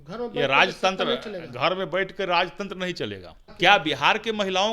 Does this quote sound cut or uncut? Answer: cut